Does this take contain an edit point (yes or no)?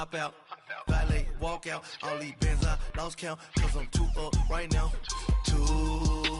no